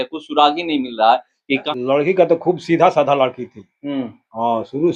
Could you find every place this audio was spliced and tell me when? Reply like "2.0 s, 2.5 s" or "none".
1.6 s

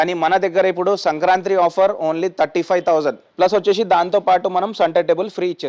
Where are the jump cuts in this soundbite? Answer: 3.2 s

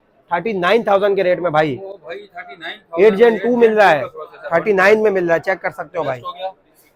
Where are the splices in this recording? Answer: none

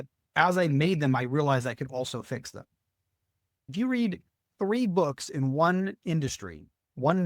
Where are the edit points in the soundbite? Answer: 3.7 s

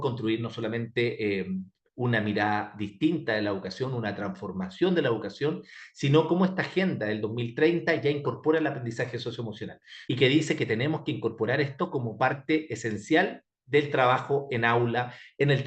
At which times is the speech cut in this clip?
9.9 s

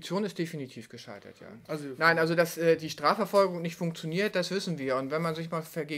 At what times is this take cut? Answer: 1.9 s

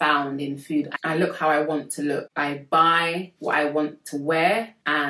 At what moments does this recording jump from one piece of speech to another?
0.9 s, 2.3 s

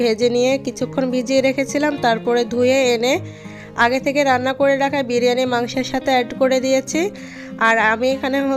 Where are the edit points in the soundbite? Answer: none

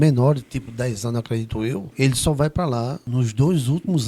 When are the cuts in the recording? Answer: 1.9 s, 3.0 s

